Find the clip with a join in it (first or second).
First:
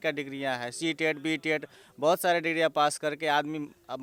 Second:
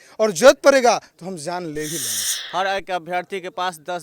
second